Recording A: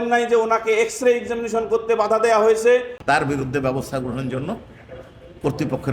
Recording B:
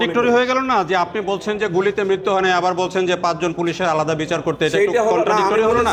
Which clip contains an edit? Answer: A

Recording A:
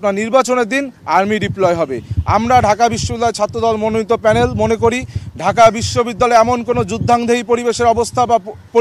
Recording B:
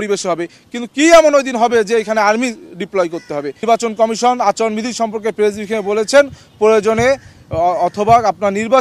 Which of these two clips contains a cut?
B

